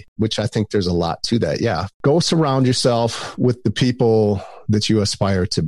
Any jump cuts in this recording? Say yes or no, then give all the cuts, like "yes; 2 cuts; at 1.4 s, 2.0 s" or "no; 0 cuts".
no; 0 cuts